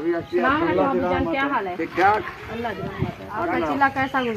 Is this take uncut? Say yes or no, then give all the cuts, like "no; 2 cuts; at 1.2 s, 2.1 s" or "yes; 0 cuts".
no; 1 cut; at 3.3 s